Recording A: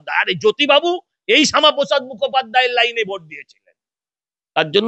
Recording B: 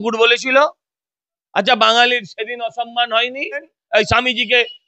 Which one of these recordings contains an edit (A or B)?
B